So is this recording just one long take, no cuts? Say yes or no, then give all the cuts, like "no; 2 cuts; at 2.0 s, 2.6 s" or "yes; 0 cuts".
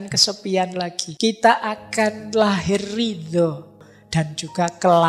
no; 2 cuts; at 1.0 s, 3.8 s